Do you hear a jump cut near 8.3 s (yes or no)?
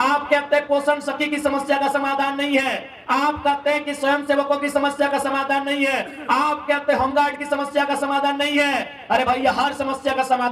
no